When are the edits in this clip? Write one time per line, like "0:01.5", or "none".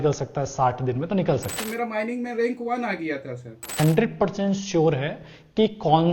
0:01.6
0:03.7